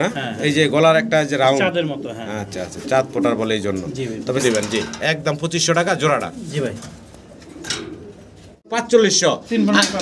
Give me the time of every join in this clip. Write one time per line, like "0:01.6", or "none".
0:04.4
0:08.8